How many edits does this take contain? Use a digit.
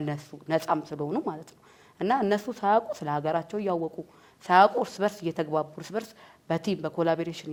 0